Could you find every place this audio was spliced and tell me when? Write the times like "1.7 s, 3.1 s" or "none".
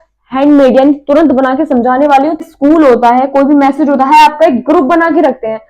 2.5 s